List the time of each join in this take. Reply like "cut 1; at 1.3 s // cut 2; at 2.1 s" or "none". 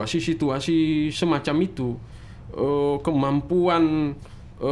none